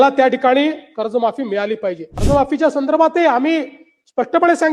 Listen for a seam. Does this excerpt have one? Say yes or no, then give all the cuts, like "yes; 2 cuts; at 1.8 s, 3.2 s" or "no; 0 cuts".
yes; 1 cut; at 2.1 s